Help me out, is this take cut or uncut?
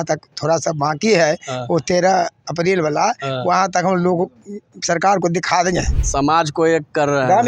cut